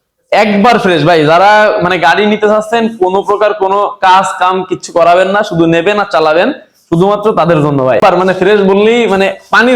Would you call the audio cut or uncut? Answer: cut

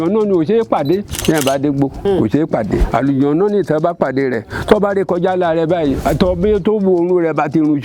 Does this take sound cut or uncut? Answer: cut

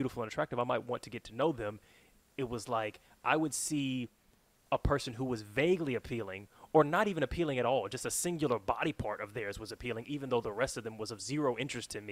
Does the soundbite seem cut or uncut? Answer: uncut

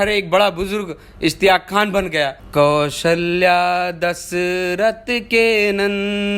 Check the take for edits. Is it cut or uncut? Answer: cut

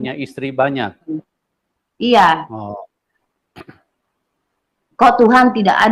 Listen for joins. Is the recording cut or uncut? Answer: uncut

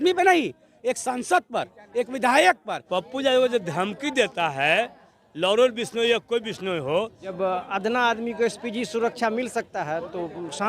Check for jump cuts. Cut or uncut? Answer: cut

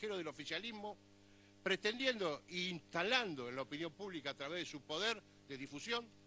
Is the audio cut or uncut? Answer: uncut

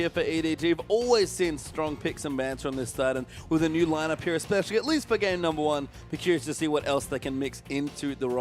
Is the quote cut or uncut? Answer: cut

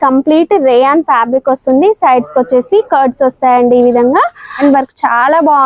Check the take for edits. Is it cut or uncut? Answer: cut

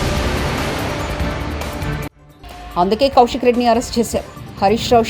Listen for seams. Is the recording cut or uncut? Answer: cut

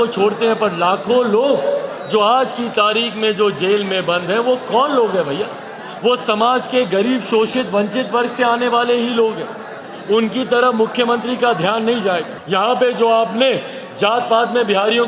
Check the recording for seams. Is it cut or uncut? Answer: cut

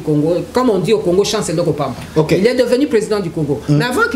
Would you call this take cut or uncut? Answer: uncut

